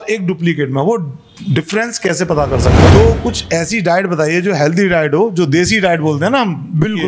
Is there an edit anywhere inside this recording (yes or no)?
yes